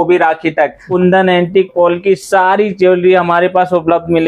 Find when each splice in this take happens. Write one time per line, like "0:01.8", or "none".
0:00.9
0:01.7